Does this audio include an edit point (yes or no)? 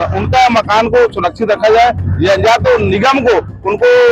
no